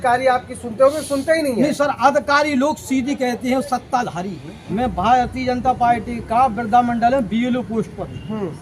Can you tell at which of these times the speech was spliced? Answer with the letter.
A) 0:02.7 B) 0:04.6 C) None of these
B